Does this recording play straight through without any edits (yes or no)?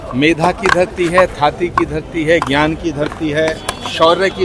yes